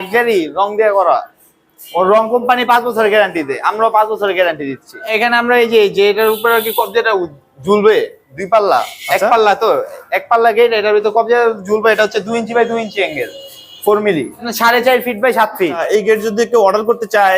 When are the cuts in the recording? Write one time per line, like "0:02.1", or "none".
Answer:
0:05.1
0:14.5
0:15.8